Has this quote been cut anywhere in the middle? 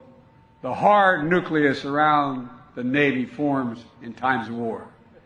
no; 0 cuts

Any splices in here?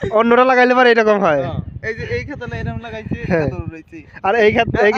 no; 0 cuts

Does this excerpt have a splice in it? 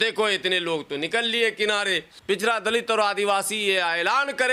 yes; 1 cut; at 2.1 s

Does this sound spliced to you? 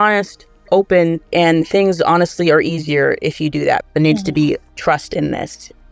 yes; 2 cuts; at 1.2 s, 3.8 s

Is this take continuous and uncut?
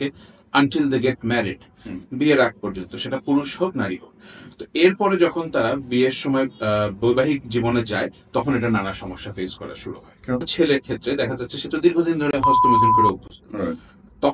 no; 1 cut; at 10.4 s

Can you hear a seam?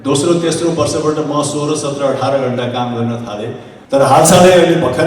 yes; 1 cut; at 3.7 s

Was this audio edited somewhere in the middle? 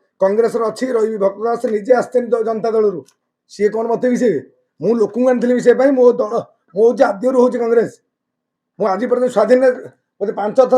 no; 0 cuts

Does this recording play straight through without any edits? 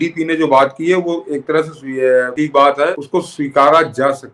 no; 2 cuts; at 2.3 s, 3.0 s

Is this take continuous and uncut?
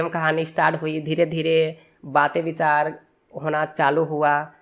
yes; 0 cuts

